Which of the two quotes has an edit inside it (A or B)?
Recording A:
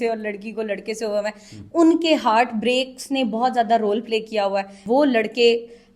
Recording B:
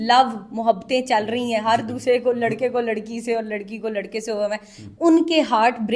A